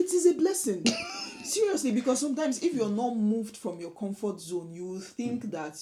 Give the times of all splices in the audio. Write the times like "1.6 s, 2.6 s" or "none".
none